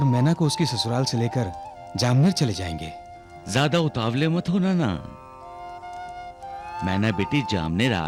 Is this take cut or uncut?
uncut